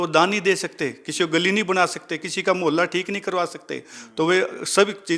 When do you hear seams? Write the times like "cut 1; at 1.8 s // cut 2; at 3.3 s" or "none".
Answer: none